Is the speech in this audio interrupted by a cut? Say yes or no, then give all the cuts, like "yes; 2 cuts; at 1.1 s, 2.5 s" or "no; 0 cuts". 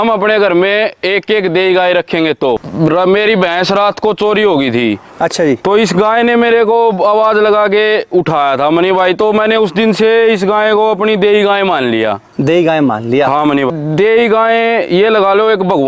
yes; 2 cuts; at 2.6 s, 13.7 s